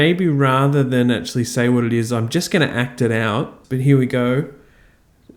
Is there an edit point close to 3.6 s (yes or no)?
yes